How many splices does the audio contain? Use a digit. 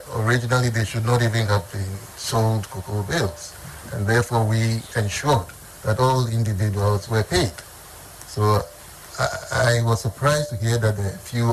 0